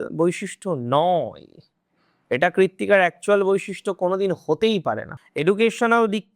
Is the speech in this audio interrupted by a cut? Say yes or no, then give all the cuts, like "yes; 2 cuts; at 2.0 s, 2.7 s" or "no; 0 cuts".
yes; 1 cut; at 5.1 s